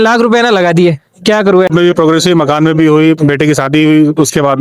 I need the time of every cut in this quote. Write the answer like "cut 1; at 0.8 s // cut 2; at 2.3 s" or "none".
cut 1; at 1.7 s